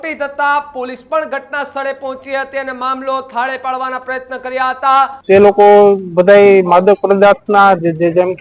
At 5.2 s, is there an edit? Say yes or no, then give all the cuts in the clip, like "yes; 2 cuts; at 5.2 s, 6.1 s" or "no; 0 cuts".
yes; 1 cut; at 5.2 s